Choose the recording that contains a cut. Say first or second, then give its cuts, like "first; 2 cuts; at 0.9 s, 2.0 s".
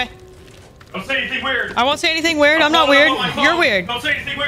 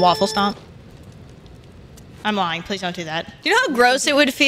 second; 2 cuts; at 2.2 s, 3.3 s